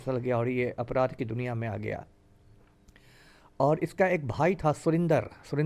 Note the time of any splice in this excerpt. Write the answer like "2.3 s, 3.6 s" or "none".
none